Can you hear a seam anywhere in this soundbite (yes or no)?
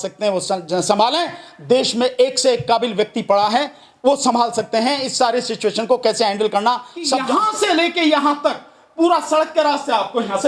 yes